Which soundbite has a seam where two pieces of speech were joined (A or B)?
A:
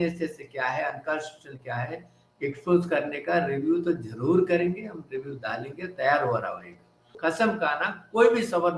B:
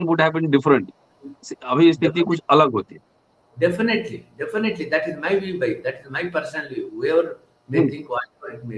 A